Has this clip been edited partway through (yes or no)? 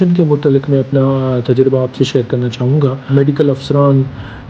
yes